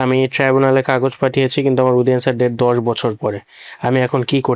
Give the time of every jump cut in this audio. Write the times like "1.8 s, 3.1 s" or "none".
none